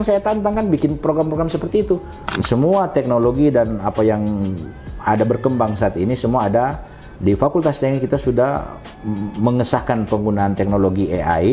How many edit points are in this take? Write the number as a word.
one